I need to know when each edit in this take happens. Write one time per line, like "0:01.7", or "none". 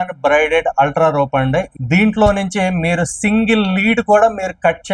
0:01.7